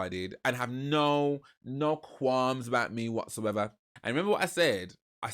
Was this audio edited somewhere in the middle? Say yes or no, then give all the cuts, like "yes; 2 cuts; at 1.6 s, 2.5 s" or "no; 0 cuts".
yes; 1 cut; at 3.9 s